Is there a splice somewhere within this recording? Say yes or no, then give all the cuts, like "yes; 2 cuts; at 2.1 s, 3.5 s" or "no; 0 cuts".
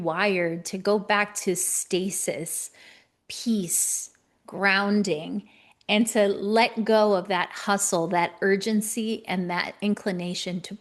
no; 0 cuts